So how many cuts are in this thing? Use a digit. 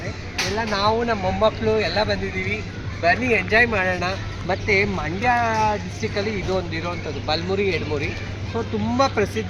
0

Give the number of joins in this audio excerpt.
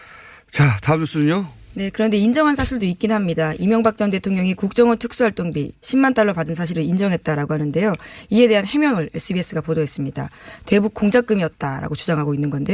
0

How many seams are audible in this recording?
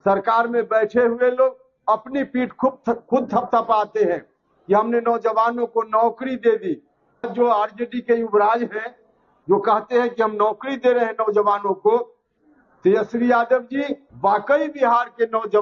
2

